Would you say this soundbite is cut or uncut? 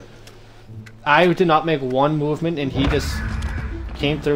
uncut